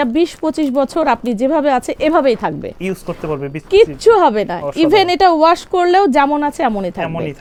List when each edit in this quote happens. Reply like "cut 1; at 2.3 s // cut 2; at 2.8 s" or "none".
none